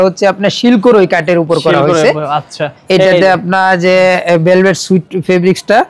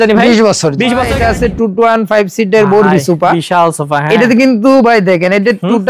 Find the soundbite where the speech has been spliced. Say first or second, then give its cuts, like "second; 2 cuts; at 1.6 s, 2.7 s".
second; 1 cut; at 1.1 s